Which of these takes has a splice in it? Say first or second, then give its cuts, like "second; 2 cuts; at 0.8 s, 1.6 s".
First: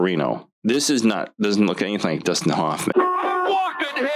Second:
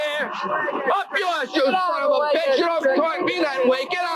first; 1 cut; at 2.9 s